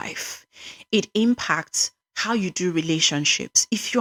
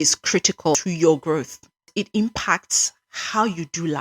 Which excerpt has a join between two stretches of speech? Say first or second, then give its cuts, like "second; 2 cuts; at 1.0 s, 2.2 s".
second; 2 cuts; at 0.7 s, 1.9 s